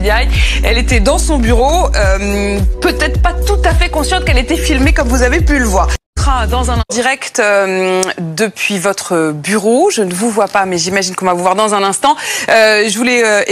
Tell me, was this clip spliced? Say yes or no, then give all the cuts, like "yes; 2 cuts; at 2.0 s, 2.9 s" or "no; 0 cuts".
no; 0 cuts